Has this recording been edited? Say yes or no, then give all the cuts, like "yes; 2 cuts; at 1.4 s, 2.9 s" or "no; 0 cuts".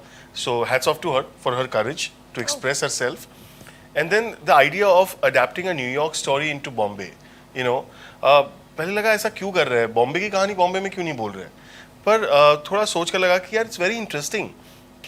no; 0 cuts